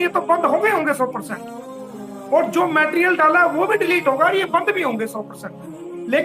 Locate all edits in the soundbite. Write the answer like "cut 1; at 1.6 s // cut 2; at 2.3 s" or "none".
none